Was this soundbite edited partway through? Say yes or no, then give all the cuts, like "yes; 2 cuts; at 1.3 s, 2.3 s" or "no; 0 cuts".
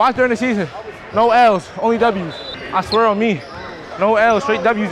yes; 1 cut; at 2.4 s